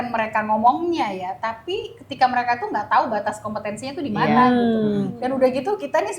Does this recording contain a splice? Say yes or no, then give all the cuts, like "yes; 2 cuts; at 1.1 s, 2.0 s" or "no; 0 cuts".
no; 0 cuts